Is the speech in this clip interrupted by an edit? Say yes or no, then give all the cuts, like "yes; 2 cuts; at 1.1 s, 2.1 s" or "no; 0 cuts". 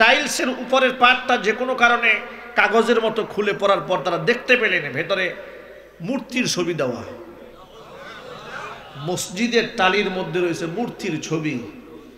no; 0 cuts